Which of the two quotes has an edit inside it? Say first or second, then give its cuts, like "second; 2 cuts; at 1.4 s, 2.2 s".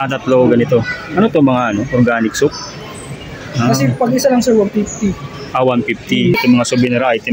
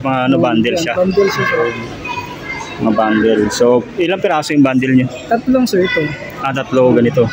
first; 1 cut; at 6.3 s